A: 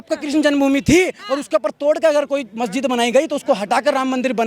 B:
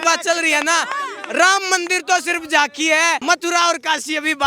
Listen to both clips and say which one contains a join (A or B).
B